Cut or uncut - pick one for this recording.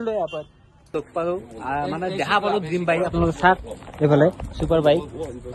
cut